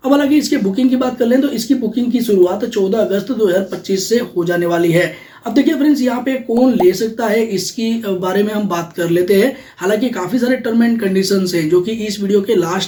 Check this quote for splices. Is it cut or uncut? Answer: uncut